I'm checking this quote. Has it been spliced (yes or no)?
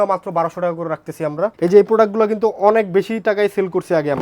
yes